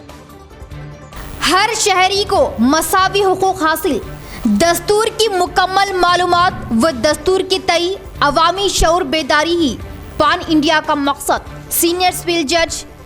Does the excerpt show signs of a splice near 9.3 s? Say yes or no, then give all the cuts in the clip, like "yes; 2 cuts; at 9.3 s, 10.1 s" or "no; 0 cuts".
no; 1 cut; at 1.1 s